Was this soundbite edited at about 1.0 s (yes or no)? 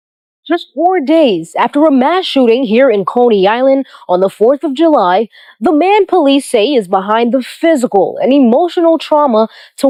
no